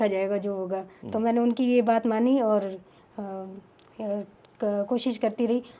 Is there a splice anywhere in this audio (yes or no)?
no